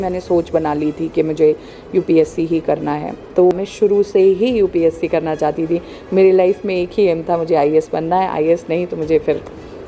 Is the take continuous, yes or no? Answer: no